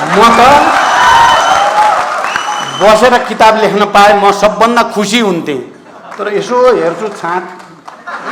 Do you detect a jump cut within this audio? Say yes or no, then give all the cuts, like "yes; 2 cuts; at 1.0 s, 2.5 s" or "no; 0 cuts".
no; 0 cuts